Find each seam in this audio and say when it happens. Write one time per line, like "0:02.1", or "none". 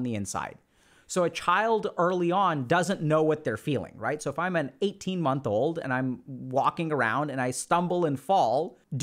none